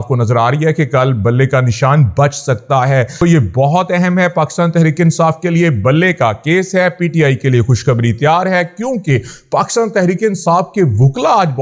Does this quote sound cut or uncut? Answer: cut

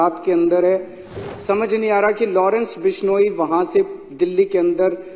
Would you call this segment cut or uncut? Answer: cut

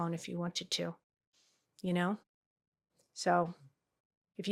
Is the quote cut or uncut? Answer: uncut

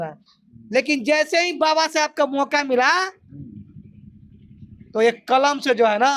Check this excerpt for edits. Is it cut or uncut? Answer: uncut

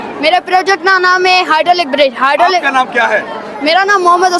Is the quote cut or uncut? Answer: uncut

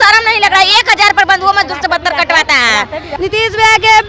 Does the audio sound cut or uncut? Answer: cut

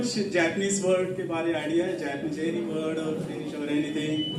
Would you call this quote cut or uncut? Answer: uncut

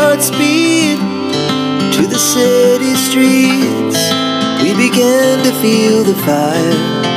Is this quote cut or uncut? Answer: uncut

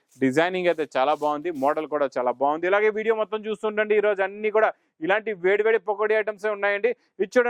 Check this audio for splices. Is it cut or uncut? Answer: uncut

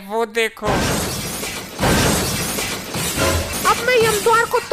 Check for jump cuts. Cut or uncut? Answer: cut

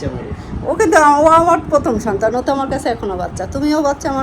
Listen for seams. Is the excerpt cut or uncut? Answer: uncut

